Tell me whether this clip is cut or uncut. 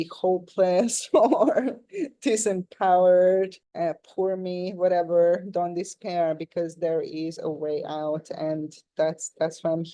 uncut